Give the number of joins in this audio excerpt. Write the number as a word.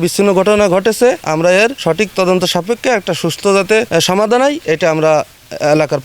two